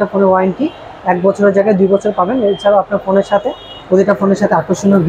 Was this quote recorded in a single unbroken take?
yes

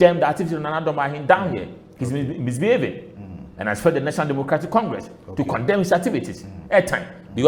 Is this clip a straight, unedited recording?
yes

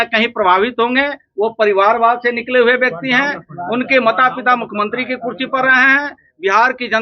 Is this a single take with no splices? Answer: yes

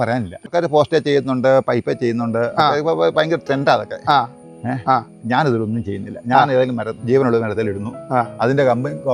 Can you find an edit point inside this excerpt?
no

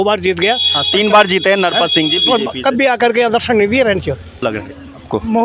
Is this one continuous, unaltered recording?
no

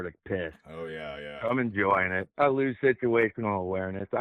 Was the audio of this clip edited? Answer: no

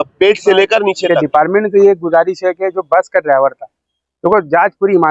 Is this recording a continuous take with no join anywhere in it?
no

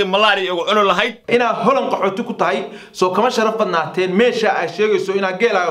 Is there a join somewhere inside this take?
yes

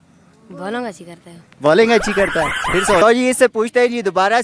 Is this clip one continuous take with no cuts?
no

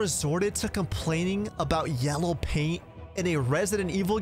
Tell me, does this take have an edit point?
no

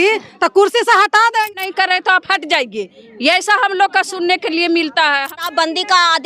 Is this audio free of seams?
no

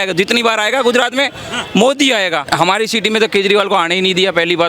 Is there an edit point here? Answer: yes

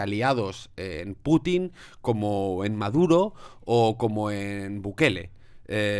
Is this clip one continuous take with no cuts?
yes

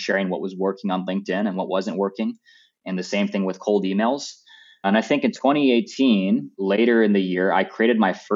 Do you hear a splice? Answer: yes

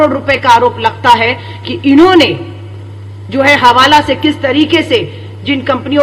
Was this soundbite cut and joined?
no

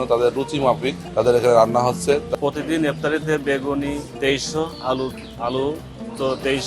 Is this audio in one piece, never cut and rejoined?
no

